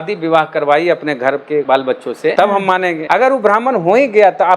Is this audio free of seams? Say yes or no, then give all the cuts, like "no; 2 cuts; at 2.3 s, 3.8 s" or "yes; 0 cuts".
no; 2 cuts; at 1.8 s, 3.0 s